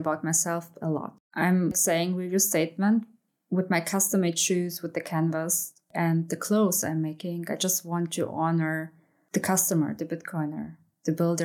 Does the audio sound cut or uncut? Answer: cut